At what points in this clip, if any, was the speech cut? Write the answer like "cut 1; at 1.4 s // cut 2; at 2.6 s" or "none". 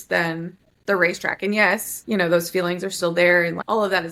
cut 1; at 1.9 s